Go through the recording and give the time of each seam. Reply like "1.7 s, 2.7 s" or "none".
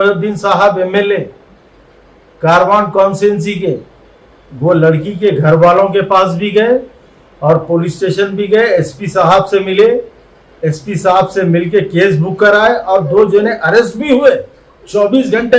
none